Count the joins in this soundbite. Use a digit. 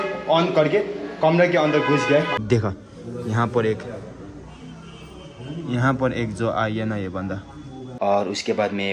2